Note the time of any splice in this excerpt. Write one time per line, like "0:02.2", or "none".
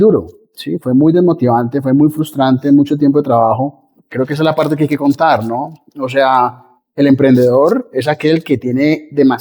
0:04.1